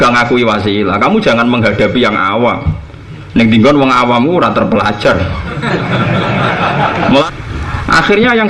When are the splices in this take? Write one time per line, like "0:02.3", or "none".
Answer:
0:07.2